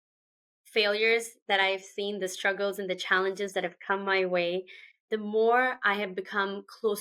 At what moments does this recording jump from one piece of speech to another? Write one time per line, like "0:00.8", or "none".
none